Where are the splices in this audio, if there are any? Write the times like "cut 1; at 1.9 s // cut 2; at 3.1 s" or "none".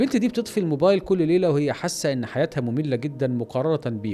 none